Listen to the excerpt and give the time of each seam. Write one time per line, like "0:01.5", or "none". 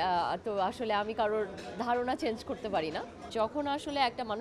0:03.3